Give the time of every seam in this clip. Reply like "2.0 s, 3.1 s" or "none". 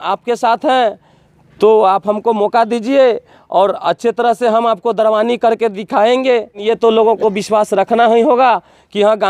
6.6 s